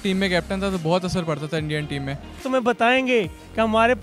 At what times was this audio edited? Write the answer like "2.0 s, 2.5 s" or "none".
2.4 s